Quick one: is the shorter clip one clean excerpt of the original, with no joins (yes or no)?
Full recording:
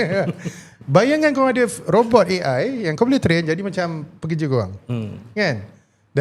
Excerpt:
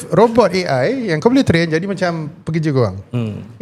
yes